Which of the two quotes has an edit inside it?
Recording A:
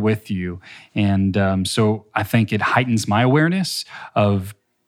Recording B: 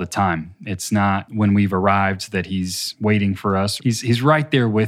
B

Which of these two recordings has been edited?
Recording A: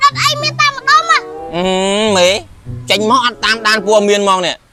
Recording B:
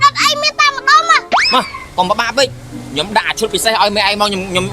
B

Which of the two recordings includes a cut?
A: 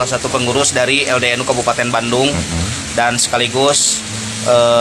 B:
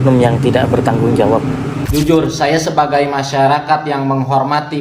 B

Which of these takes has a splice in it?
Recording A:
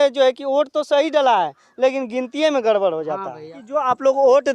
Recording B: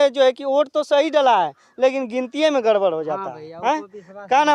A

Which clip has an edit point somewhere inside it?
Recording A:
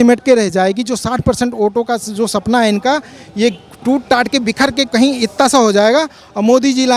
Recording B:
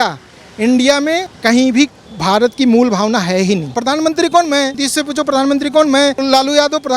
B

